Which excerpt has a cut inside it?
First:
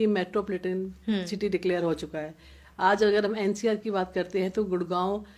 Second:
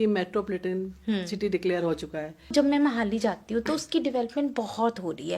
second; 1 cut; at 2.5 s

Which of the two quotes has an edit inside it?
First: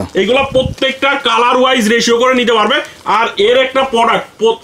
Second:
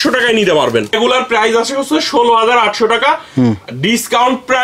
second; 1 cut; at 0.9 s

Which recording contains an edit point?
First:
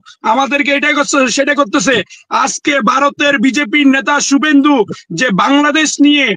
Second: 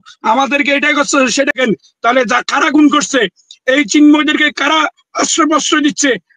second; 1 cut; at 1.5 s

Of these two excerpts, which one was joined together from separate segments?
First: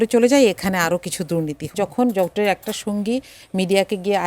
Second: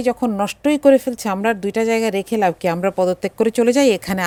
first; 1 cut; at 1.7 s

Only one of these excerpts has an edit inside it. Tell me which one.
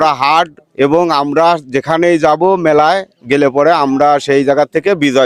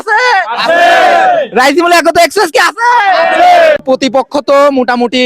second; 1 cut; at 3.8 s

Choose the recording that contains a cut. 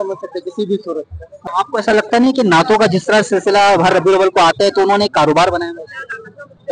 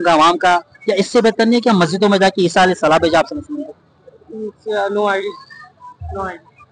first; 1 cut; at 1.5 s

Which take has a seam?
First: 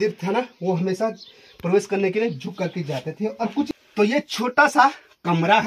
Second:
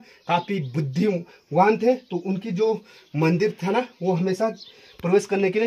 first; 1 cut; at 3.7 s

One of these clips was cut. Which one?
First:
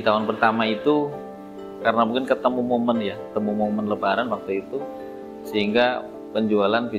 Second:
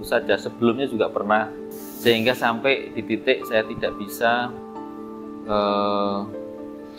second; 1 cut; at 1.6 s

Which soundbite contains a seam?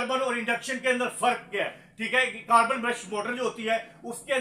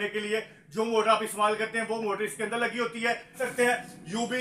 second; 1 cut; at 3.4 s

